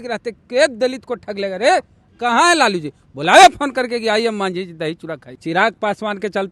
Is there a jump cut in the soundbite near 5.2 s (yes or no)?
yes